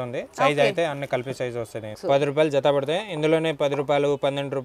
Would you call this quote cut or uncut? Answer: cut